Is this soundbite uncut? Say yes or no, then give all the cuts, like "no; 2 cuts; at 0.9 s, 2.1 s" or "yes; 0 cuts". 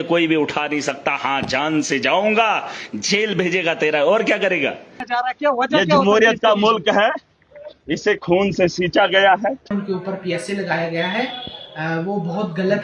no; 2 cuts; at 5.0 s, 9.7 s